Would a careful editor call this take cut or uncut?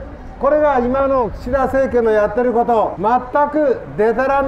cut